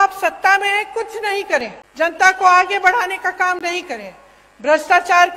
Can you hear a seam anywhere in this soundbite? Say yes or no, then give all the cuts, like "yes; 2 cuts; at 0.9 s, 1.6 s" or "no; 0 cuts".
yes; 1 cut; at 1.8 s